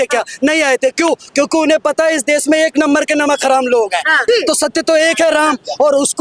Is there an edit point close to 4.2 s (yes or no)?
yes